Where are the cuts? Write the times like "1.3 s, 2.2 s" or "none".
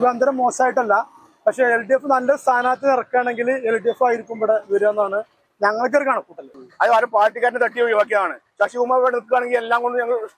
6.5 s